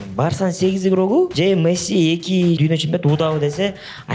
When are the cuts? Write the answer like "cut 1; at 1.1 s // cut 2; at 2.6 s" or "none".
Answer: cut 1; at 1.3 s // cut 2; at 2.6 s